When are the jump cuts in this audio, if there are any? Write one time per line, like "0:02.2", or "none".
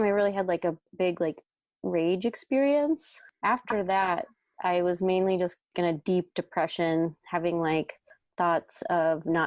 none